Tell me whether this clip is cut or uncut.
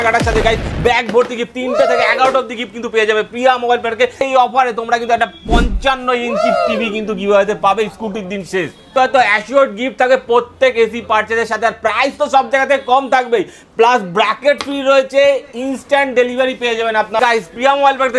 cut